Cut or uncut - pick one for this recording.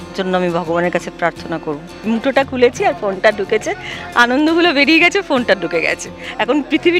cut